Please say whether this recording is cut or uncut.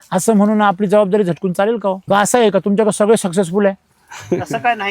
cut